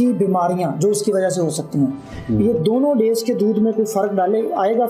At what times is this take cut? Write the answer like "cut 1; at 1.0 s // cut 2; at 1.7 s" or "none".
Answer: none